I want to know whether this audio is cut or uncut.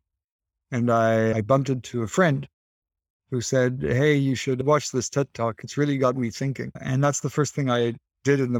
uncut